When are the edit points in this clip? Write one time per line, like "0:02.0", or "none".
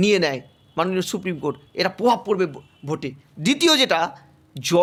none